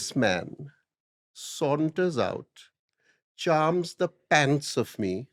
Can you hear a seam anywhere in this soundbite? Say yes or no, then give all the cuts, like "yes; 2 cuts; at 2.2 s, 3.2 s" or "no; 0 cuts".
no; 0 cuts